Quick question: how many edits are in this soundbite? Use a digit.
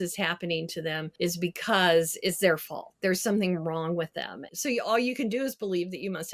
2